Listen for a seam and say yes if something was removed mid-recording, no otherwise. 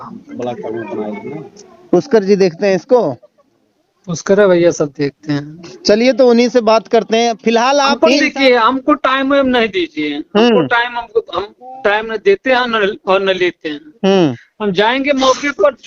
yes